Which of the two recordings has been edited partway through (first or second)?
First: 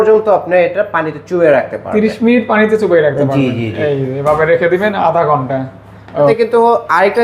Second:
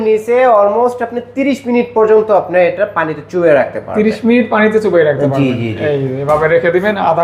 first